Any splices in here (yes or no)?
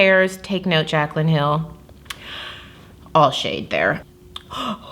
yes